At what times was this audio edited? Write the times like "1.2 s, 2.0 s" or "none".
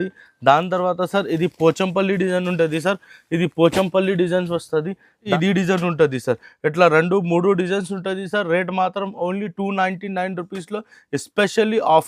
5.2 s